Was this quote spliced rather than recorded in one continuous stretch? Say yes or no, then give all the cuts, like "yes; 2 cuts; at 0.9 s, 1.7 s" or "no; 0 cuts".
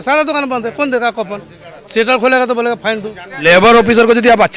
yes; 1 cut; at 3.3 s